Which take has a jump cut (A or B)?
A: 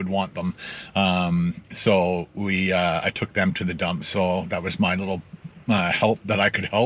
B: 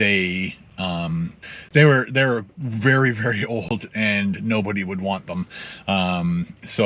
B